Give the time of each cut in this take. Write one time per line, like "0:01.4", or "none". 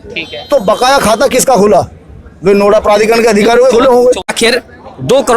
0:04.3